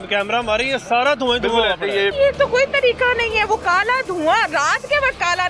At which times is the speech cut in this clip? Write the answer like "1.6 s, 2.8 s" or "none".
2.1 s